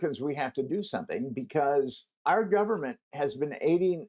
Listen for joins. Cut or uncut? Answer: cut